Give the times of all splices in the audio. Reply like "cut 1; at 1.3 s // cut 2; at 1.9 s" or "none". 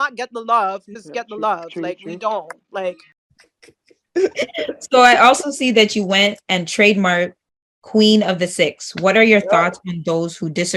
cut 1; at 3.1 s // cut 2; at 8.8 s